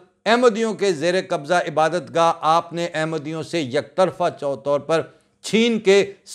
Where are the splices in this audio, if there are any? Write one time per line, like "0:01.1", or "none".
none